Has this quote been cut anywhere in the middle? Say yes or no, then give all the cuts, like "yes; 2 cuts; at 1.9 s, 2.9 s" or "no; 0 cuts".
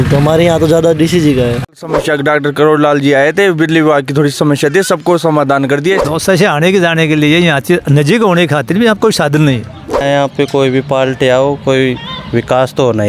yes; 3 cuts; at 1.8 s, 6.0 s, 10.0 s